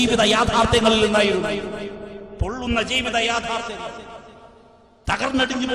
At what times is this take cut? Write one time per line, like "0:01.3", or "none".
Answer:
none